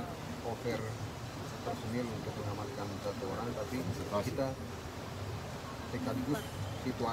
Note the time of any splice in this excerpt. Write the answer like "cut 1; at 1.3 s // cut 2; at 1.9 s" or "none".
none